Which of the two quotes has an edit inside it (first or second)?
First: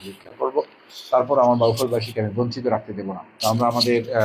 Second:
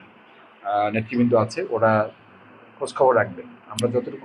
first